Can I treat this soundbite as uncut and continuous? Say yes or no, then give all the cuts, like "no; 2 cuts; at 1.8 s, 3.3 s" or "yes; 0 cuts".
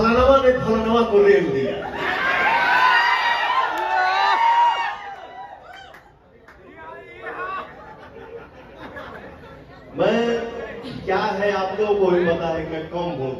yes; 0 cuts